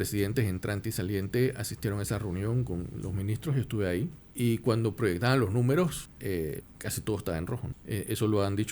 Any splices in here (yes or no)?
yes